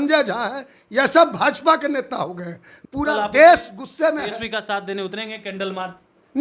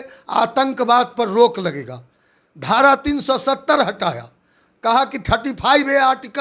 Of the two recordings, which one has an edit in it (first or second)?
first